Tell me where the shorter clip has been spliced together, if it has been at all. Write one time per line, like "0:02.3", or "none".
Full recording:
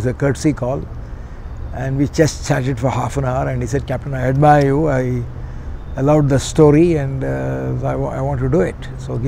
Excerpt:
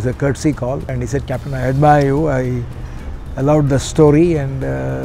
0:00.9